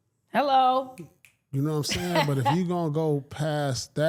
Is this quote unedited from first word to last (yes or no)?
yes